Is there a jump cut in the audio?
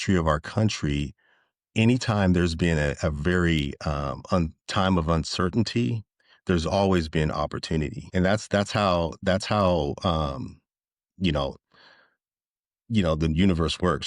yes; 1 cut; at 8.0 s

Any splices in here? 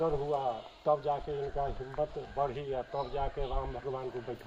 no; 0 cuts

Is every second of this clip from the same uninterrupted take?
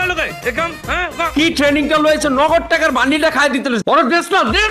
yes; 0 cuts

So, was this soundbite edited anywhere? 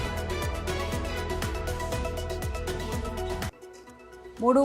yes; 2 cuts; at 2.1 s, 3.5 s

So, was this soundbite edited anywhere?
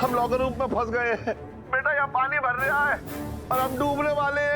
yes; 1 cut; at 1.5 s

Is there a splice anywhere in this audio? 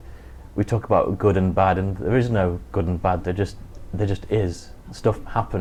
no; 0 cuts

